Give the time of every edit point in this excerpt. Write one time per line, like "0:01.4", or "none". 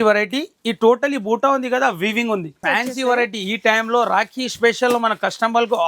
0:02.6